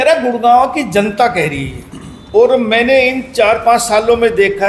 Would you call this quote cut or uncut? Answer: uncut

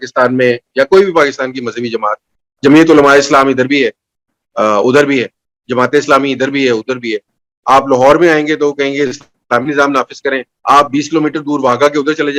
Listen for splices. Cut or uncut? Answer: uncut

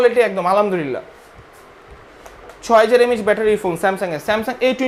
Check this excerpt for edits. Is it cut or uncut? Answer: uncut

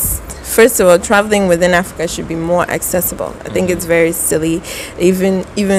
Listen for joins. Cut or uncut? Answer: uncut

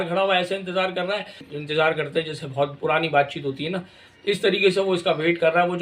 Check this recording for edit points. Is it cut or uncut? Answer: cut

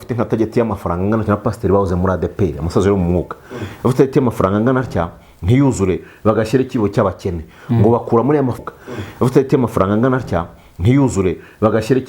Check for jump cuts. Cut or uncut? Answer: cut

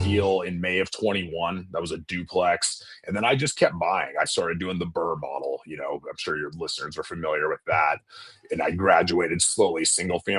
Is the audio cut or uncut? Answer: uncut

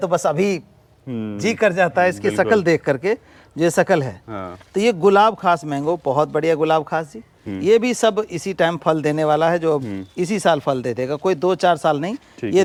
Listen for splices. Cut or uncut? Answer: uncut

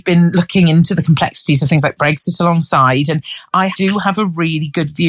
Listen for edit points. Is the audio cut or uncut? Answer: cut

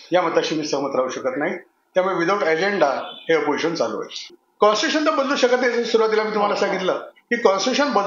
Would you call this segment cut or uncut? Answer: cut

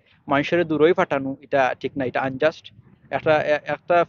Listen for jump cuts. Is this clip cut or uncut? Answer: uncut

